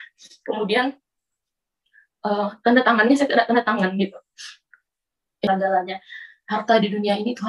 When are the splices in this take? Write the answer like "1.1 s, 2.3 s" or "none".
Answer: 5.5 s